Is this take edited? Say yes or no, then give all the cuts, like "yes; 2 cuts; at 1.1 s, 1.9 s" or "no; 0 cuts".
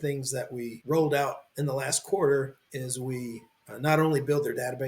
yes; 2 cuts; at 1.5 s, 2.6 s